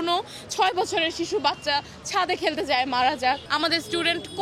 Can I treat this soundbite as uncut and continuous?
no; 1 cut; at 3.5 s

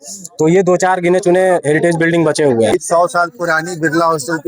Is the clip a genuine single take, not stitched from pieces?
no; 1 cut; at 2.8 s

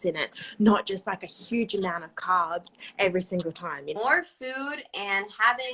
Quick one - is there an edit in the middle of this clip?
no; 0 cuts

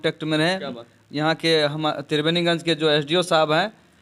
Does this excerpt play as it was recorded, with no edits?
yes; 0 cuts

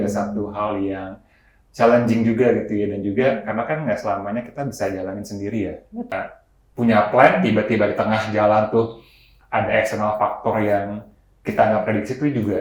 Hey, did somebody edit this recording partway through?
yes; 1 cut; at 6.1 s

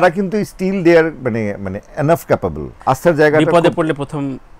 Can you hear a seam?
yes; 1 cut; at 2.7 s

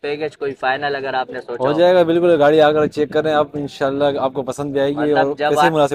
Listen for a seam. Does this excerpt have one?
no; 0 cuts

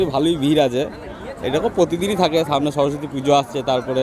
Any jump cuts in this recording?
no; 0 cuts

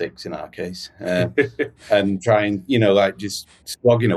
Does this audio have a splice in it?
no; 0 cuts

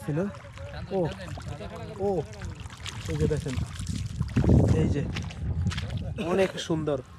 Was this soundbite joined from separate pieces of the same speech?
no; 0 cuts

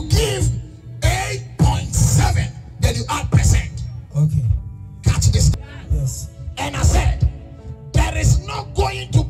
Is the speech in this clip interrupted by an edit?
yes; 1 cut; at 5.5 s

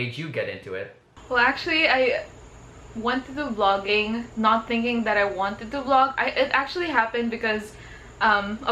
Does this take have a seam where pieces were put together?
no; 0 cuts

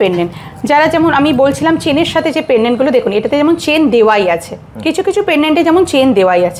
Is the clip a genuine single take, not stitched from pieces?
yes; 0 cuts

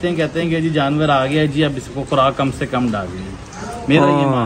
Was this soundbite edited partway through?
no; 0 cuts

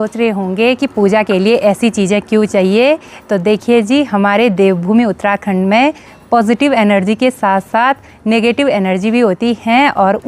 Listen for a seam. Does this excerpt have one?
no; 0 cuts

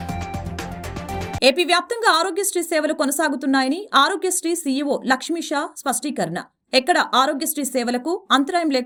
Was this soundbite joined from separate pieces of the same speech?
no; 0 cuts

